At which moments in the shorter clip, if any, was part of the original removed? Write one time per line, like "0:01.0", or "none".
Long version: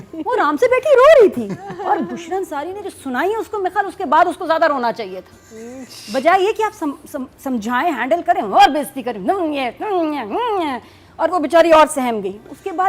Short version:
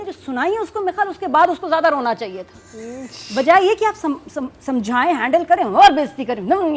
none